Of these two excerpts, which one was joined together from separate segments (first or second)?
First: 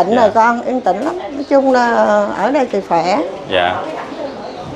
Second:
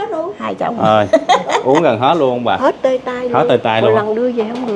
second